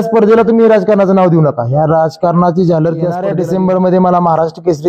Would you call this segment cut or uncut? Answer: cut